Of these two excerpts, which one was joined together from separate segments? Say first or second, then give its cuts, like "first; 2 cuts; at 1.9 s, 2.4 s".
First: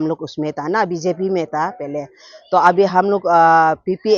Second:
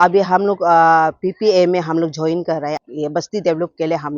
second; 1 cut; at 2.8 s